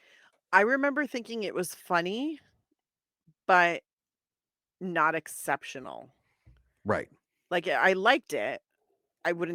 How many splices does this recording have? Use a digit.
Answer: 0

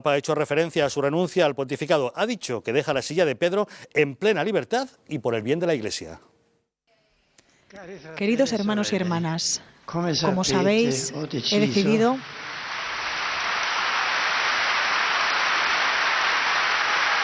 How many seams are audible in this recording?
1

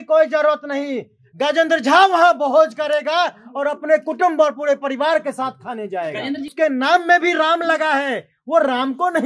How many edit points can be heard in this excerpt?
1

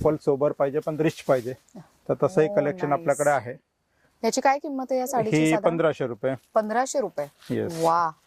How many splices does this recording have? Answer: 0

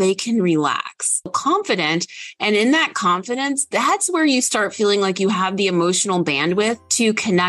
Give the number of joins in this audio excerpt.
1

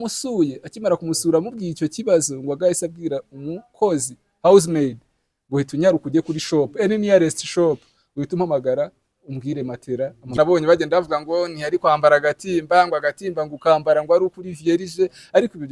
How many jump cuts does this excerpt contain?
1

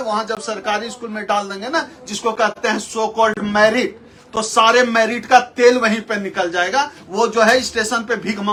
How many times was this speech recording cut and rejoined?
0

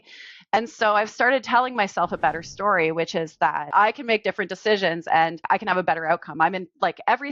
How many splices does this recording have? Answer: 2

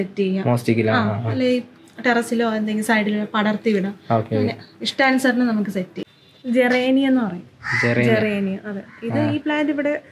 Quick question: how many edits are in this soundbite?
1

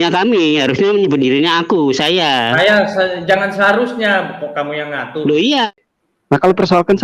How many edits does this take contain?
1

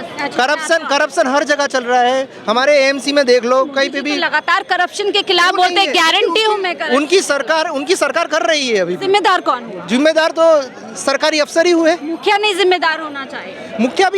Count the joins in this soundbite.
0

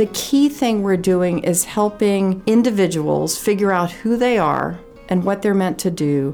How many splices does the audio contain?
1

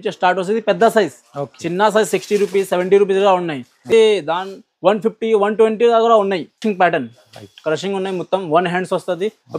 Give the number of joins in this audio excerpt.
2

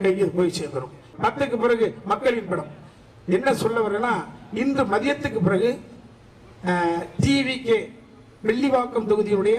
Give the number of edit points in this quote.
1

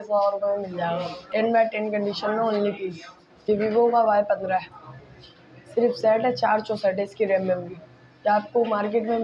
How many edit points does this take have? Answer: 2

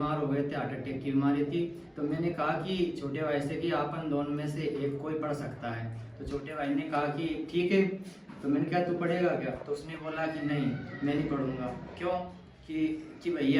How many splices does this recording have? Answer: 0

